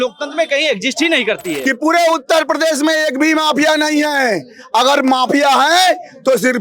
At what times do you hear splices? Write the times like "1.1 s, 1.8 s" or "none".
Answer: 1.5 s